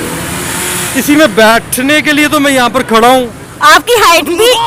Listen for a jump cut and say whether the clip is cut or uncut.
uncut